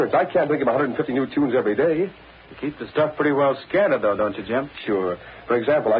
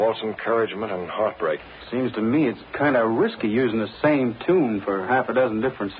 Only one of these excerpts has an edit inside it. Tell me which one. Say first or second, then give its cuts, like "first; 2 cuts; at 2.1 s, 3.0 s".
second; 1 cut; at 1.7 s